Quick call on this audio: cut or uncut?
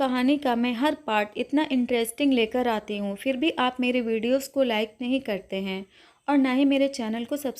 uncut